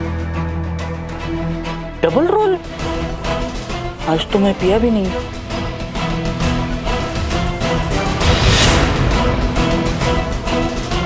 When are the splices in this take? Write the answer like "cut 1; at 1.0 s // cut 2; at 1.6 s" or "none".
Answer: cut 1; at 1.2 s // cut 2; at 2.8 s